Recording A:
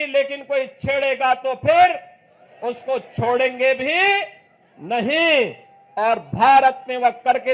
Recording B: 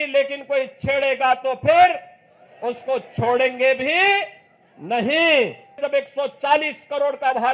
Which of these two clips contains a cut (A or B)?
B